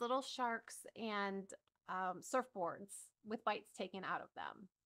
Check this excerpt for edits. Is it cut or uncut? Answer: uncut